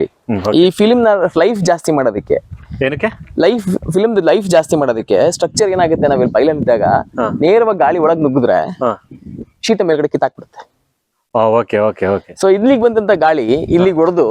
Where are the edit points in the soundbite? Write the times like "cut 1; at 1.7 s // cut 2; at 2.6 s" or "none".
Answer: none